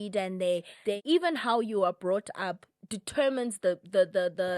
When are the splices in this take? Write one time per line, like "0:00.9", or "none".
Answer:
0:01.0